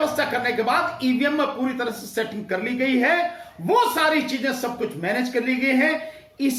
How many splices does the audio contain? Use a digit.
0